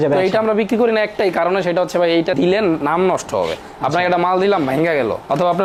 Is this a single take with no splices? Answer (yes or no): yes